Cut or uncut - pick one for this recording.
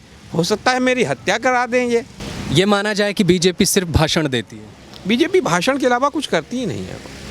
uncut